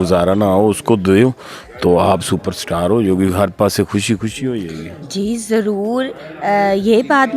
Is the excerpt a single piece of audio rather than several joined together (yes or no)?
yes